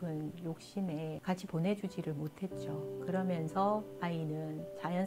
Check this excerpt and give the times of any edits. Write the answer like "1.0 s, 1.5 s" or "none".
1.2 s